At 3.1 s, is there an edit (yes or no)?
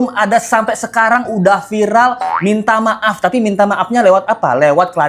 no